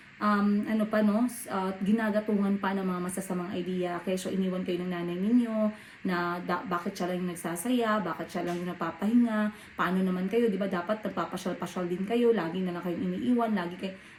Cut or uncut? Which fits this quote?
uncut